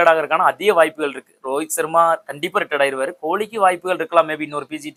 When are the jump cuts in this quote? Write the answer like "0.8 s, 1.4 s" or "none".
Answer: none